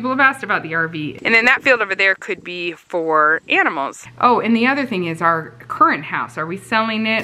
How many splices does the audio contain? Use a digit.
2